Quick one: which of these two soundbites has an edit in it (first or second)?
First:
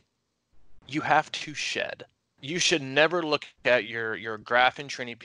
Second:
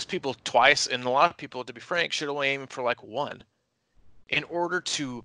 first